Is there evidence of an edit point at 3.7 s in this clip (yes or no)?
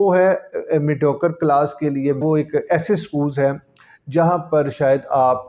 no